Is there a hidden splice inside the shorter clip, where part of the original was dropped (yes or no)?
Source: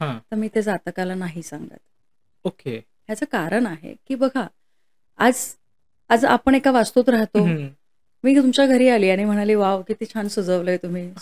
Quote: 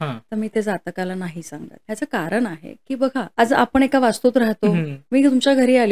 yes